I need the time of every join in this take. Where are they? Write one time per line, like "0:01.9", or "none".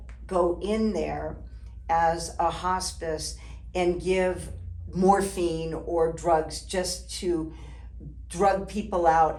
none